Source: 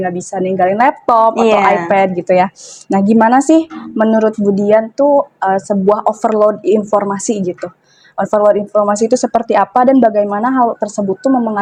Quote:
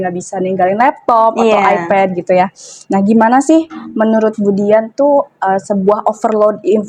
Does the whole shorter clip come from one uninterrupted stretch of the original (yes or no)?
yes